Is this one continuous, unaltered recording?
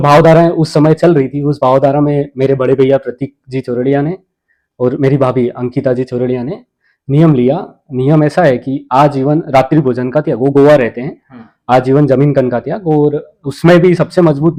yes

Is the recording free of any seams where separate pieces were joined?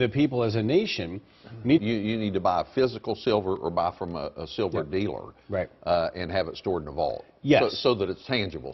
yes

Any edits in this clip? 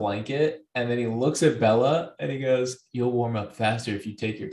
no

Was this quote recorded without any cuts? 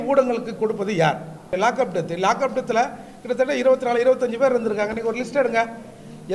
no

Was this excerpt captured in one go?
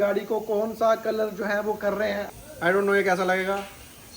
no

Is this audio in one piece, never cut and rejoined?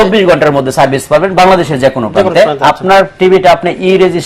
yes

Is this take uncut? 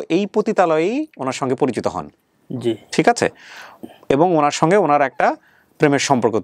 yes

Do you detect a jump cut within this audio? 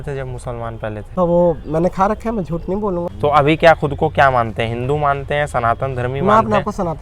yes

